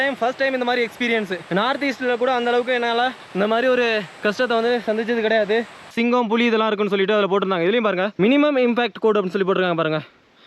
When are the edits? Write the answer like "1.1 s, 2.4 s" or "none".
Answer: 5.8 s